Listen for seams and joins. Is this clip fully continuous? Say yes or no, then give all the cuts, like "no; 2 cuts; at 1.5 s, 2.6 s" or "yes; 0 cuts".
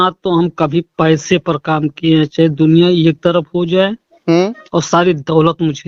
yes; 0 cuts